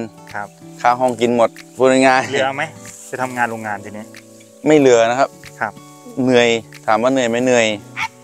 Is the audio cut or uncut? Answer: uncut